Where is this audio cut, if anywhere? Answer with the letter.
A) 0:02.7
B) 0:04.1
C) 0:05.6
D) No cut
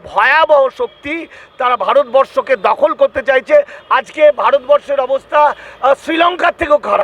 D